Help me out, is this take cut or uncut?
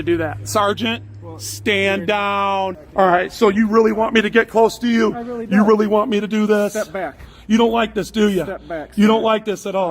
cut